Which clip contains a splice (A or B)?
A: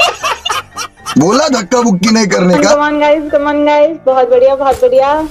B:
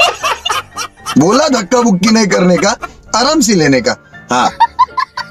A